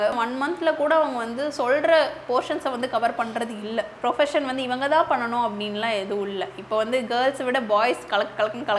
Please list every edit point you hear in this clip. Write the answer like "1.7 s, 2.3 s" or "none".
3.9 s